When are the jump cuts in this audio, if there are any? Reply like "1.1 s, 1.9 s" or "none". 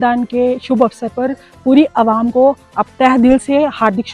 none